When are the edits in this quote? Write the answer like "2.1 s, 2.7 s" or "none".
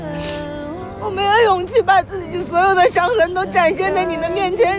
0.9 s